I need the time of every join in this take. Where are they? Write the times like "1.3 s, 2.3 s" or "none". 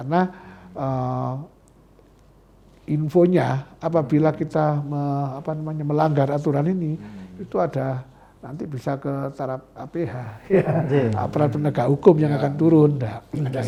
none